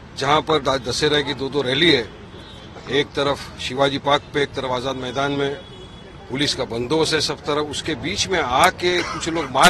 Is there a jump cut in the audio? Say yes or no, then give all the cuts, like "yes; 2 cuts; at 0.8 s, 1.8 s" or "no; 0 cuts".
no; 0 cuts